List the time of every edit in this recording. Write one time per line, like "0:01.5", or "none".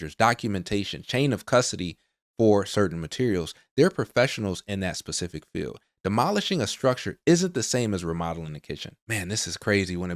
0:09.0